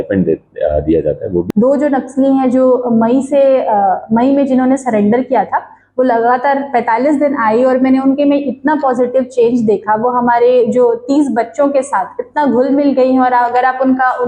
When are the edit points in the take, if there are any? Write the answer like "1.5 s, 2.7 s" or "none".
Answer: 1.5 s